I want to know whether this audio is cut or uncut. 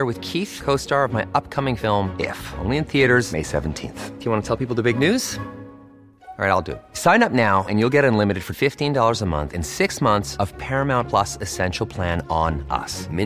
uncut